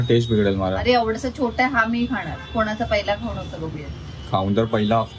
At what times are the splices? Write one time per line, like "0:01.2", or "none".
none

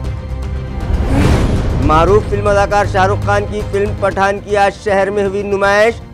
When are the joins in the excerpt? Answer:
0:01.7

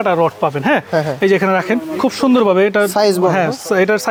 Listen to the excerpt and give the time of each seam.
none

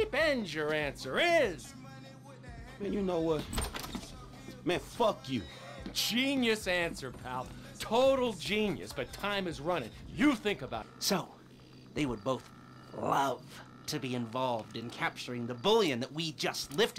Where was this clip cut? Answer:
0:10.9

